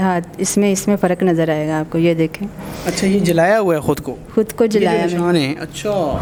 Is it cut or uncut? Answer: uncut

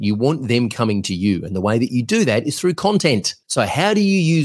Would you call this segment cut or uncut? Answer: cut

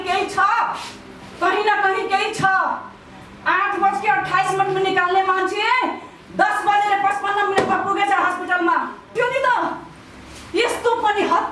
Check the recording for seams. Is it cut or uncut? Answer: cut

